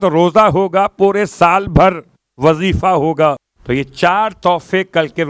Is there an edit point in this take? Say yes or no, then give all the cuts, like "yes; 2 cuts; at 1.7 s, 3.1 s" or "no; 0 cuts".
yes; 1 cut; at 3.5 s